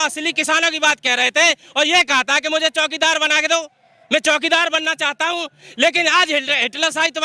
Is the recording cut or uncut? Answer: uncut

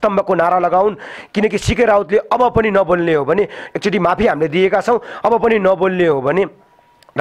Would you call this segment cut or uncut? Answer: uncut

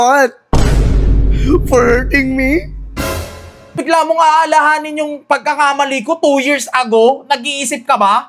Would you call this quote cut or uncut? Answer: cut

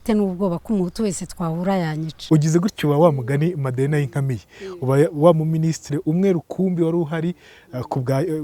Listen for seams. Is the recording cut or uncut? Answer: cut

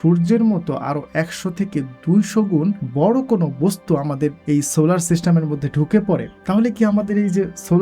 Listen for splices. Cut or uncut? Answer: cut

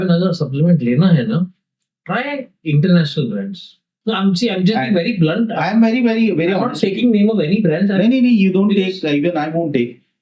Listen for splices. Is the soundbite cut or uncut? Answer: cut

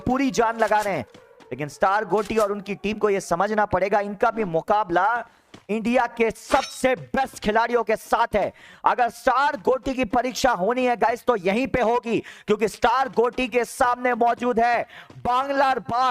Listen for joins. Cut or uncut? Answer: uncut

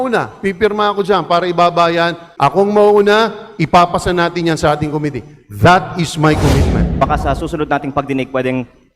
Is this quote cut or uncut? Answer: cut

